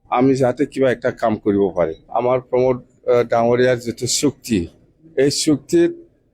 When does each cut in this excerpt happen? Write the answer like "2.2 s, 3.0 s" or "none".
2.1 s